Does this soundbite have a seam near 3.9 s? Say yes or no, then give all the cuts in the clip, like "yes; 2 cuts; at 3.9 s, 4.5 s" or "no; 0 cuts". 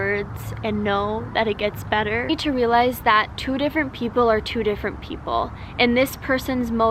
no; 1 cut; at 2.3 s